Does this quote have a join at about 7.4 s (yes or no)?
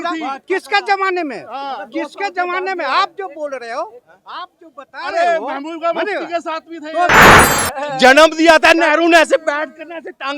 yes